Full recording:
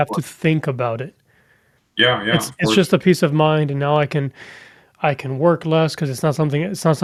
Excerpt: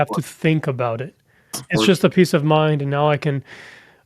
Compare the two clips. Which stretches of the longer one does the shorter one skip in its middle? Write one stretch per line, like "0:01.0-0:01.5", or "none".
0:01.6-0:02.5